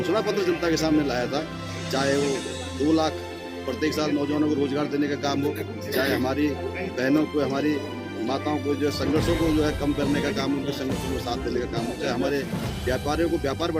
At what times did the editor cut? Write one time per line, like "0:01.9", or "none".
none